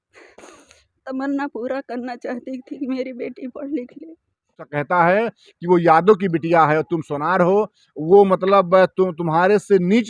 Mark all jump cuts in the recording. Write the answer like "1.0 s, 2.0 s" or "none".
4.7 s